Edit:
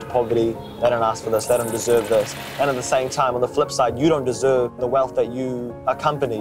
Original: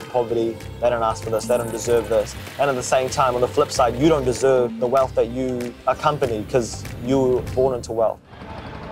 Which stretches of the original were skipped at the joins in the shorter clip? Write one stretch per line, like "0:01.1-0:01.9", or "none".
none